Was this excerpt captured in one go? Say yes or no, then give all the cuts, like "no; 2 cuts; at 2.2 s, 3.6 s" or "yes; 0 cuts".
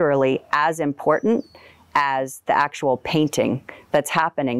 yes; 0 cuts